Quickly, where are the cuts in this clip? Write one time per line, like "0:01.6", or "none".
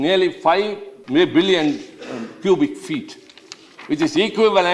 0:00.9